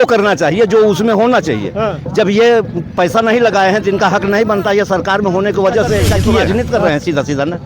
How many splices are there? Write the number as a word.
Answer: one